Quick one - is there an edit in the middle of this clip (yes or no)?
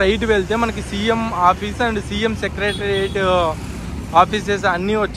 no